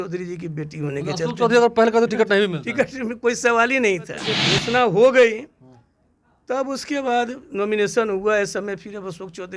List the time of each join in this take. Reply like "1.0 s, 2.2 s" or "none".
4.5 s